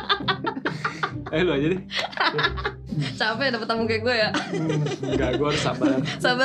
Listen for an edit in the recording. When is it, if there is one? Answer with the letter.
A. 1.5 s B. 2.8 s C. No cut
B